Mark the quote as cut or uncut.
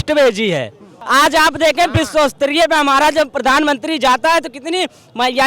cut